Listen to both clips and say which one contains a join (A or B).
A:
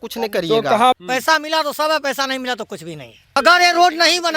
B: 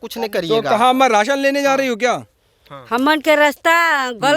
A